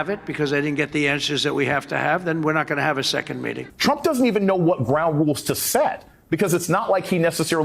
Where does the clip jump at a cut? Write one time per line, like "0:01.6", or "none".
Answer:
0:03.6